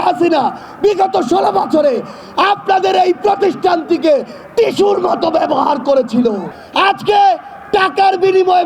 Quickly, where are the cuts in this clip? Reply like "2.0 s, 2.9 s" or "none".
6.5 s